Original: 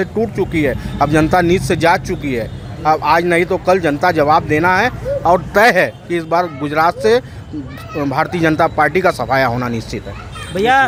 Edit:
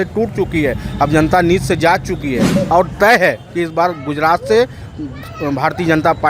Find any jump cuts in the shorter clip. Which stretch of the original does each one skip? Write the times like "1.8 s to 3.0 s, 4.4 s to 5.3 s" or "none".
2.5 s to 5.1 s